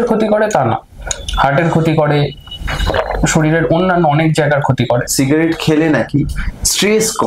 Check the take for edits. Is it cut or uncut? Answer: cut